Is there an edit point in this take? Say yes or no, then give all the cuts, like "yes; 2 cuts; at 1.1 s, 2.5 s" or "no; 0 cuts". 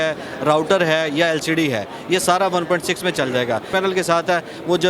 yes; 1 cut; at 3.7 s